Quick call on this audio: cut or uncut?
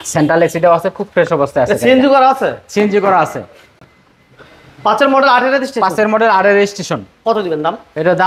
uncut